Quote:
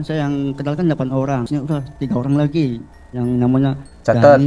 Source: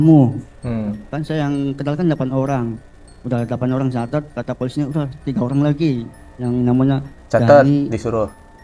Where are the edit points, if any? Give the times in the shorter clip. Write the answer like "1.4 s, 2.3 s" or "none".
1.5 s